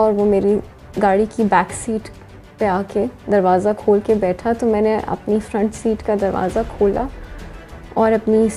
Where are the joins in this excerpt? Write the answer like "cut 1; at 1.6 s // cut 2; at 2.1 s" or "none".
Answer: none